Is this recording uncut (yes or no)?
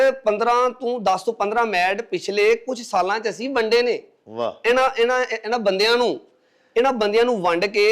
yes